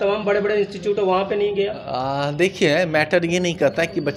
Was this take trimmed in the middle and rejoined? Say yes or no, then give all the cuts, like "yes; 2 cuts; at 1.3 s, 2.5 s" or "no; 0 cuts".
no; 0 cuts